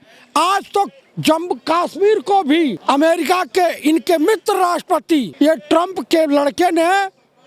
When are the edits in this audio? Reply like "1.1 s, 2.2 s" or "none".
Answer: 1.1 s, 2.8 s, 5.3 s